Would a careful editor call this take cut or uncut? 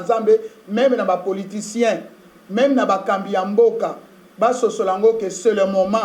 uncut